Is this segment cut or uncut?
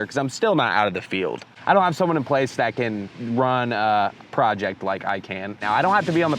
cut